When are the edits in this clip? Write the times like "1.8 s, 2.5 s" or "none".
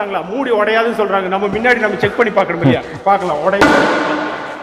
none